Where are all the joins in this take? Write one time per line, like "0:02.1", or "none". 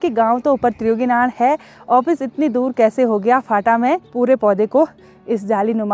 0:04.1